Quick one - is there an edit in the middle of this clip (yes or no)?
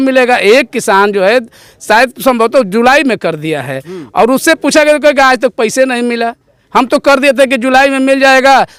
no